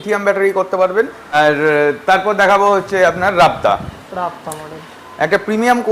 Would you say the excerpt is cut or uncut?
cut